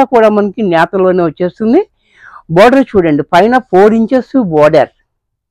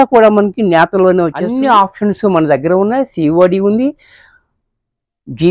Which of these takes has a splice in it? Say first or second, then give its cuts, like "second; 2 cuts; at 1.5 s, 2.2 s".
second; 1 cut; at 1.5 s